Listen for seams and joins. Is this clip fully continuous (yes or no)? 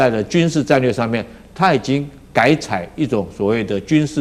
yes